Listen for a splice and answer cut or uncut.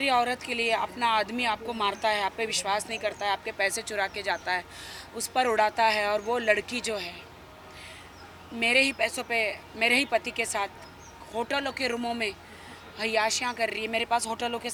uncut